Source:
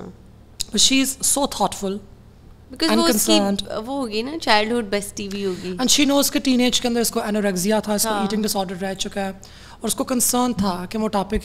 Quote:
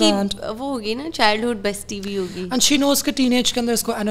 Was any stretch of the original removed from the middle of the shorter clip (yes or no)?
no